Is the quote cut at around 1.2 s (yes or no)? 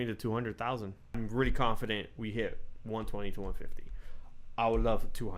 yes